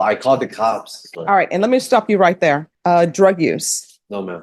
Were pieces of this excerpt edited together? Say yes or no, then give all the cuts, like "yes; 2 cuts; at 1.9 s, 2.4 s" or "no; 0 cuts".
yes; 2 cuts; at 1.0 s, 2.7 s